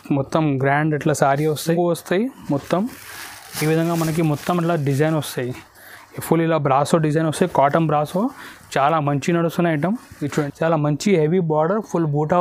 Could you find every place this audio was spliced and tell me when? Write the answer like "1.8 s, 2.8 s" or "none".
1.7 s, 10.3 s